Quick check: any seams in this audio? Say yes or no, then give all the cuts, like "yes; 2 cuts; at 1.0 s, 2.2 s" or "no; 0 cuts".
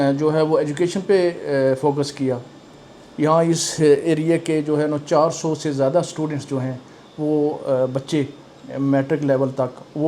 no; 0 cuts